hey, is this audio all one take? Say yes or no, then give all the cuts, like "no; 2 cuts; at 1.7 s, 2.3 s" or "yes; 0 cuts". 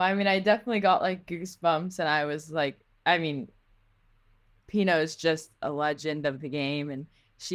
yes; 0 cuts